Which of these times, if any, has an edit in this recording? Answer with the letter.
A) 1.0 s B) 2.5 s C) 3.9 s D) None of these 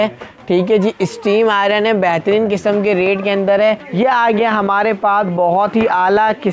C